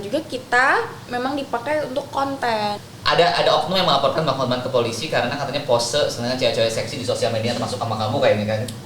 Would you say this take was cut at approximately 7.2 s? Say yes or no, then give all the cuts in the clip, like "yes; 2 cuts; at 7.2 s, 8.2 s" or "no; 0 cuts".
no; 1 cut; at 2.9 s